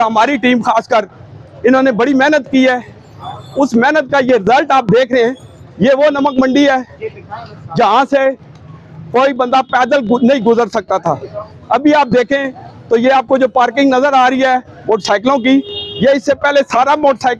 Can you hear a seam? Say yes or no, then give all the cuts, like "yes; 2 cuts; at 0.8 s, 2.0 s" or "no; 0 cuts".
no; 0 cuts